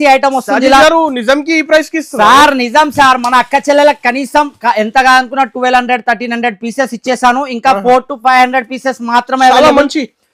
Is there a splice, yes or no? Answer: no